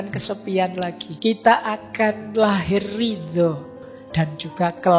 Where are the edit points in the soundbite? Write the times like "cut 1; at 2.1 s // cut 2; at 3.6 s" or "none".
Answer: cut 1; at 1.1 s // cut 2; at 3.8 s